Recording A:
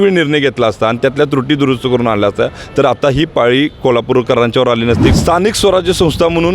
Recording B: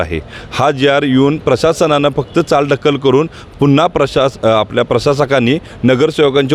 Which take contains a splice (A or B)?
A